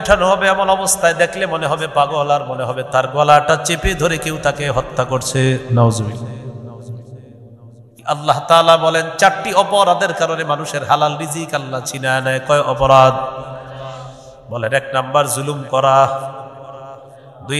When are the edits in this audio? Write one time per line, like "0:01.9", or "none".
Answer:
0:07.9

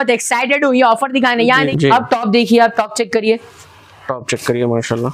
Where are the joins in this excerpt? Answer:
0:01.7

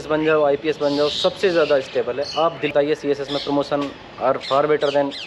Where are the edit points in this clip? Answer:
0:02.7

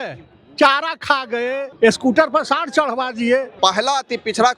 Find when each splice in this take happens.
0:01.6
0:03.5

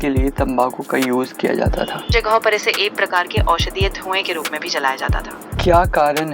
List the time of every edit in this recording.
0:02.1
0:05.4

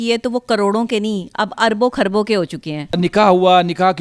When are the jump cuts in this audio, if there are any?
none

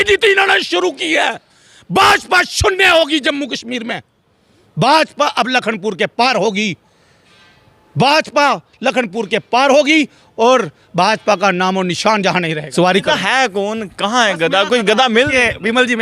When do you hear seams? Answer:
0:12.6

